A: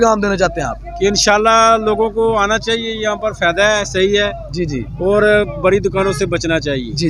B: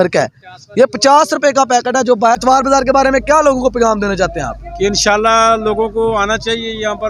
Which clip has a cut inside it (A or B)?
B